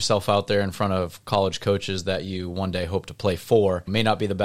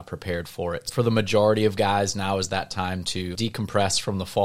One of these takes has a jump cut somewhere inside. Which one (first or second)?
second